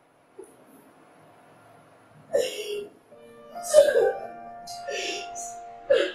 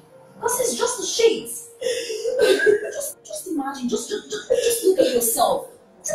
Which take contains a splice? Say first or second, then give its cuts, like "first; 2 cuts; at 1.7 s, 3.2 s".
first; 1 cut; at 4.7 s